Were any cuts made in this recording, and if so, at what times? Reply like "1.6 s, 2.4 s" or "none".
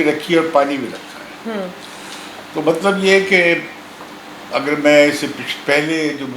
none

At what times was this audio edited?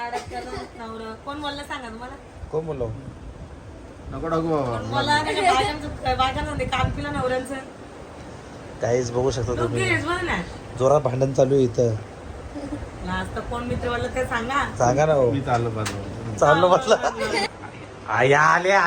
17.4 s

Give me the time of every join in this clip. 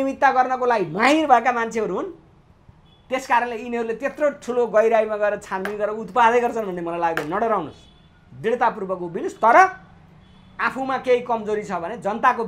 none

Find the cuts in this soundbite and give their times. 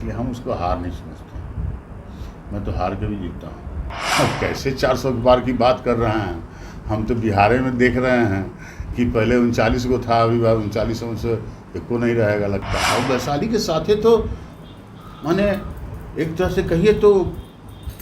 4.0 s, 12.9 s

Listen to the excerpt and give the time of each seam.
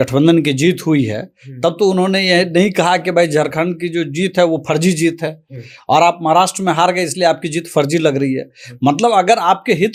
none

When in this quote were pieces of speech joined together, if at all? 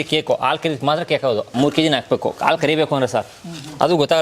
1.5 s

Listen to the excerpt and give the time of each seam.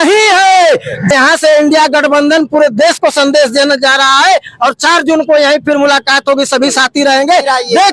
1.1 s

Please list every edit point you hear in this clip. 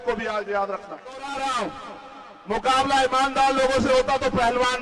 1.3 s

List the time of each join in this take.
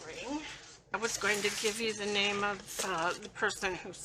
0.9 s

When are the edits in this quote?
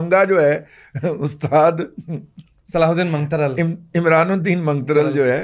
none

